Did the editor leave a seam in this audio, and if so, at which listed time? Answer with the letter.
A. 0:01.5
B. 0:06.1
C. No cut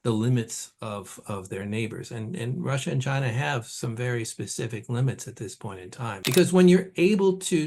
B